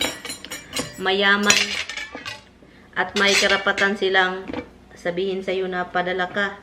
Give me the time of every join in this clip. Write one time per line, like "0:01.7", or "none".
none